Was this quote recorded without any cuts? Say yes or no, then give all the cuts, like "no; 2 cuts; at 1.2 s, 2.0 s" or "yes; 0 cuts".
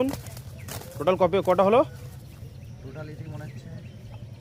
yes; 0 cuts